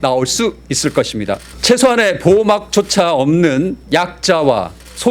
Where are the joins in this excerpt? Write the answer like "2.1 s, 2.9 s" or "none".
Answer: 1.5 s, 3.8 s